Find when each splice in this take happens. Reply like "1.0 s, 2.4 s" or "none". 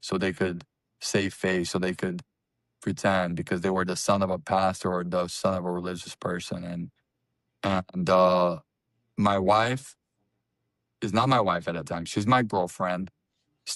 none